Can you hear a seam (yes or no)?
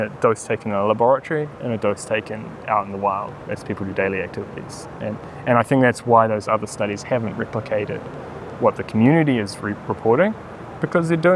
no